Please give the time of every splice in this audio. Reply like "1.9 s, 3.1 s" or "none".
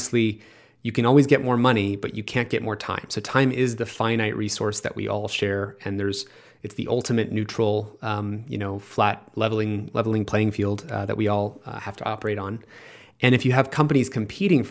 none